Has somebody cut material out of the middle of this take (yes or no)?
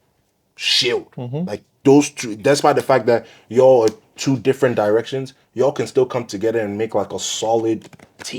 no